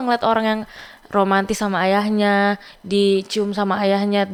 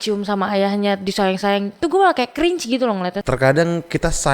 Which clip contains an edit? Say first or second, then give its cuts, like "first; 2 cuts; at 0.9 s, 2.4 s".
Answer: second; 1 cut; at 3.2 s